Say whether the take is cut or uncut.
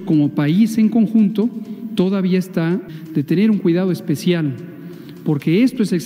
cut